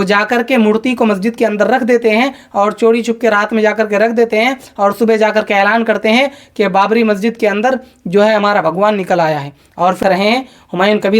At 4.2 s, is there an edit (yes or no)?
no